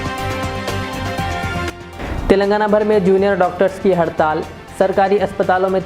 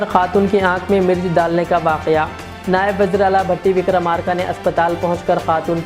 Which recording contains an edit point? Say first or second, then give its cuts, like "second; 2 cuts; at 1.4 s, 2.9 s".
first; 1 cut; at 1.7 s